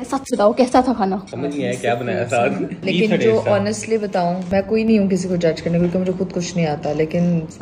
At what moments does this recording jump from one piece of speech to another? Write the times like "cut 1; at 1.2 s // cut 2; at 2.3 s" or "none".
cut 1; at 1.3 s // cut 2; at 2.8 s